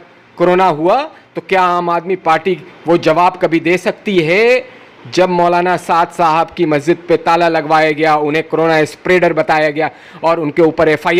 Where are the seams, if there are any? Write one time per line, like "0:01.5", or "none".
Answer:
none